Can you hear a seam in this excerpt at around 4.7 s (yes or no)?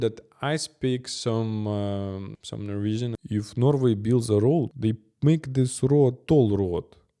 yes